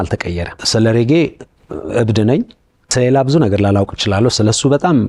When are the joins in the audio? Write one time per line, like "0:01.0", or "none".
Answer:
none